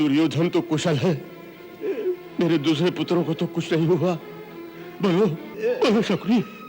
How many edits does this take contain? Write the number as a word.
two